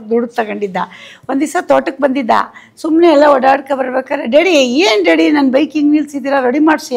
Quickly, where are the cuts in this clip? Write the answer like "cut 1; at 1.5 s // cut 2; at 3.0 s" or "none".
none